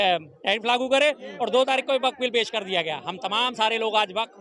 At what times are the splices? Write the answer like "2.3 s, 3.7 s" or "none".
none